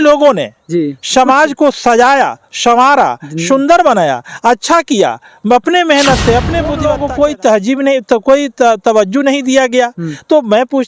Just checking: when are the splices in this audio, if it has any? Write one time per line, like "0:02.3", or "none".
0:06.8

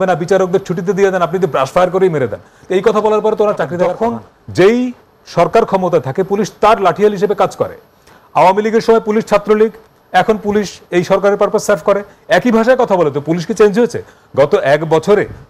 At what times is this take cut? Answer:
0:03.9

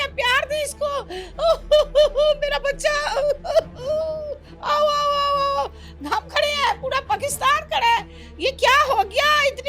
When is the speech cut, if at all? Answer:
none

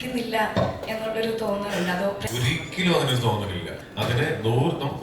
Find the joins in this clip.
0:02.2
0:03.8

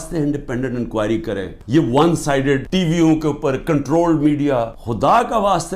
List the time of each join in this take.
0:01.5
0:02.7
0:04.8

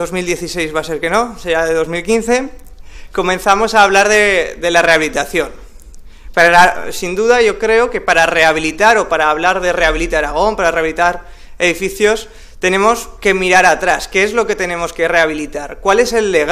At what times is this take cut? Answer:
none

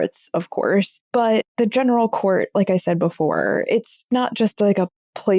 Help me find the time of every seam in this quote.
0:01.0

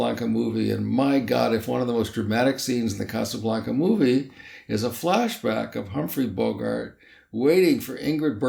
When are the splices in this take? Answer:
none

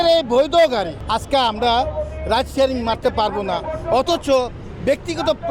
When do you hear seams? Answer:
0:01.0

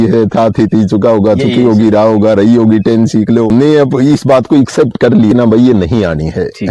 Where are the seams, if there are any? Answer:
0:03.5
0:05.3

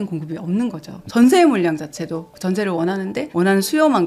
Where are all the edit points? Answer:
0:01.0
0:03.3

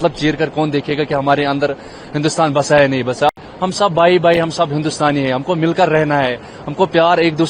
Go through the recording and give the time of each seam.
0:03.4

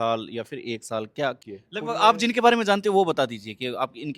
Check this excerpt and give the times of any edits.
0:01.4

